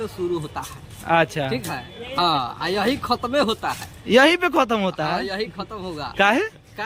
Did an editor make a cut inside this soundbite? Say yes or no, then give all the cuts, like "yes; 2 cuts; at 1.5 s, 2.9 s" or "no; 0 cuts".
no; 0 cuts